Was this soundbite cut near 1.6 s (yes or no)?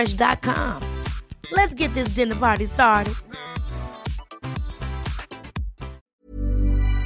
no